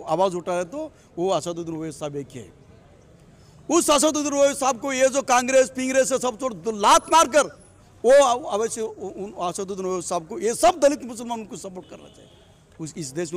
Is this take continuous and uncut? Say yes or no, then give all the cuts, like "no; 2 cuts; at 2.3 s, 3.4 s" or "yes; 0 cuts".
yes; 0 cuts